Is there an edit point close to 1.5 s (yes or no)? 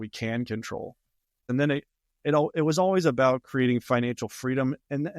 yes